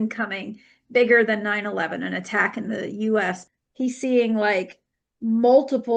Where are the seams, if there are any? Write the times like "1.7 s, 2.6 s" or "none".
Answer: 3.4 s